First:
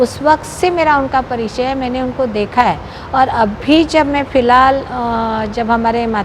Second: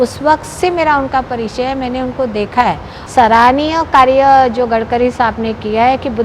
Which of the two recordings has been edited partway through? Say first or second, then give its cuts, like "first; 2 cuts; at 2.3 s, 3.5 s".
second; 1 cut; at 2.9 s